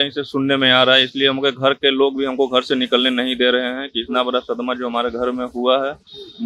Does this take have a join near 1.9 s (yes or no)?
no